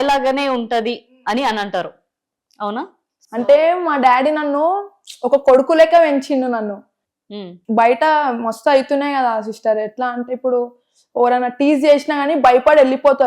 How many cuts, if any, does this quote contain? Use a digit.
1